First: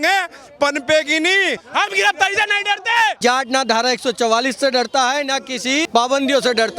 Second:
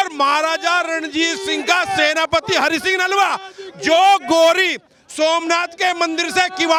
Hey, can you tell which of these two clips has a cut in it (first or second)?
first